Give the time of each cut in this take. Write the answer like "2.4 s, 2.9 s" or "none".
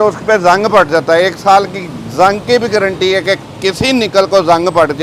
none